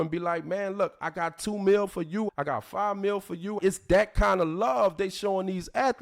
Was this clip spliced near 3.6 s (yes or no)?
yes